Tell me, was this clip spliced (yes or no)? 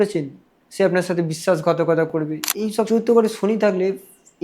yes